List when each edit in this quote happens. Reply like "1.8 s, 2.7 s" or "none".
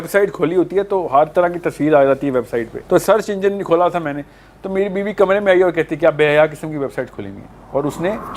2.7 s